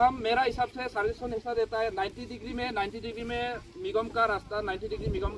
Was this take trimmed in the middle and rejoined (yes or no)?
no